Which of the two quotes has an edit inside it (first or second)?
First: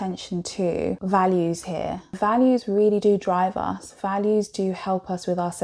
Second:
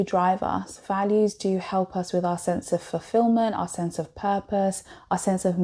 first